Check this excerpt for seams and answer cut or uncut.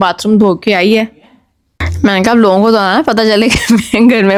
uncut